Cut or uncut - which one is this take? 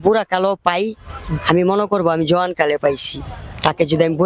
uncut